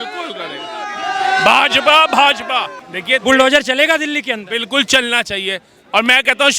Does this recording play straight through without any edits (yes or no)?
no